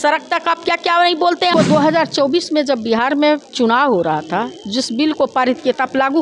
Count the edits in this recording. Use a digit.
1